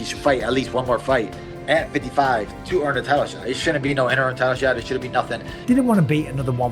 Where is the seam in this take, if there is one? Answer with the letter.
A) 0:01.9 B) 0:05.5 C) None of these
B